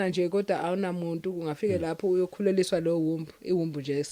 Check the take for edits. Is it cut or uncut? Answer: uncut